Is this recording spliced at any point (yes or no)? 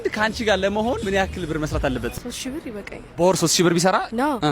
yes